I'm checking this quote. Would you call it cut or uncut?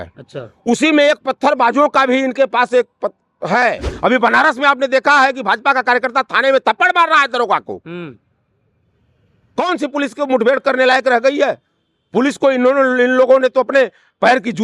cut